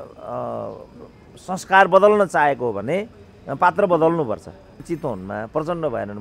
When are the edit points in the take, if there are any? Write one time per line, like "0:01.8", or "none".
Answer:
0:04.8